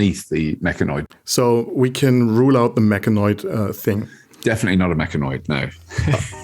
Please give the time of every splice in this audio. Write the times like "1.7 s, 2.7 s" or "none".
1.0 s

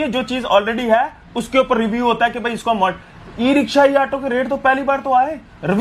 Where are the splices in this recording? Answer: none

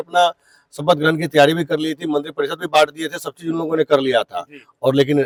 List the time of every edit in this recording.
none

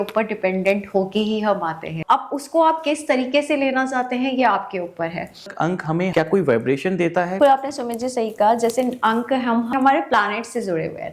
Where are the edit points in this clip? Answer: 1.9 s, 5.7 s, 7.4 s, 9.8 s

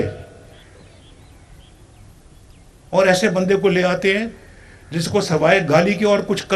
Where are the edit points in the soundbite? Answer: none

